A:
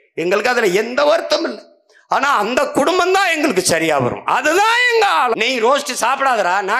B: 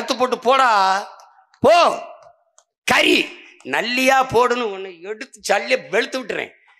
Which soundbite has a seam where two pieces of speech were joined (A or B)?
A